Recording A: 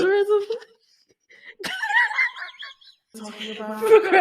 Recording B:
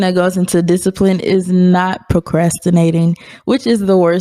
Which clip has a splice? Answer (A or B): A